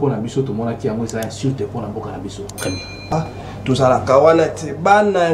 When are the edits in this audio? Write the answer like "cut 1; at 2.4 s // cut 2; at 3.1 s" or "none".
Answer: cut 1; at 3.1 s